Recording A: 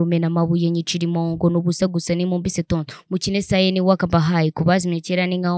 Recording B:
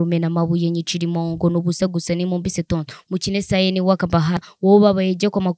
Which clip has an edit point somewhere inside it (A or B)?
B